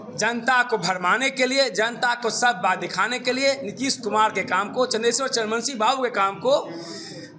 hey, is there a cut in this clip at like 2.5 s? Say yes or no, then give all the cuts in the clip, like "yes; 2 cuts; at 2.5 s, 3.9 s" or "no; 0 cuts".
no; 0 cuts